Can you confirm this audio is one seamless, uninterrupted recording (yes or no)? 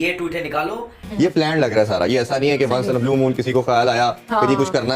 no